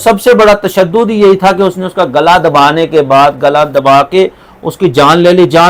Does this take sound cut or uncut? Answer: uncut